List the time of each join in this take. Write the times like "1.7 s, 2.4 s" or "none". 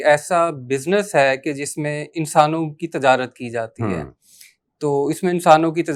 none

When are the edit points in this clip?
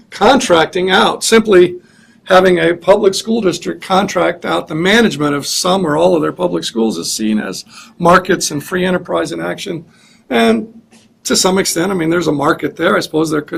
none

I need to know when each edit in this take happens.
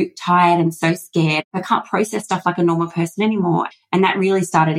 1.4 s, 3.7 s

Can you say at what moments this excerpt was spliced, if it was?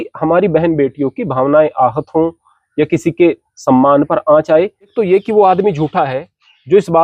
4.8 s

